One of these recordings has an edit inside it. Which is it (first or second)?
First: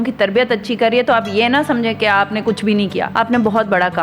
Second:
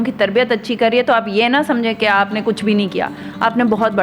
first